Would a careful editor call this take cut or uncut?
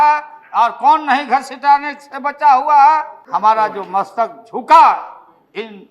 cut